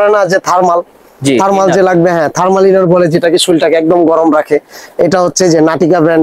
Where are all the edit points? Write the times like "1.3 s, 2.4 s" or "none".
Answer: none